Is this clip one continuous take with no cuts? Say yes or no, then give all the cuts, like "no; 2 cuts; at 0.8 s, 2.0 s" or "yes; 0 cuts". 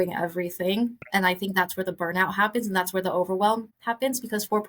no; 1 cut; at 3.7 s